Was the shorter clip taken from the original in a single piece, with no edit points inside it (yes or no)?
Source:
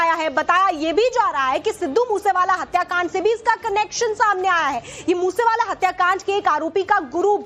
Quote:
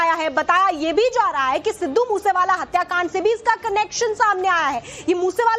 yes